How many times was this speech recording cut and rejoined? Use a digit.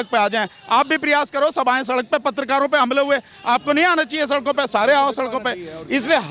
0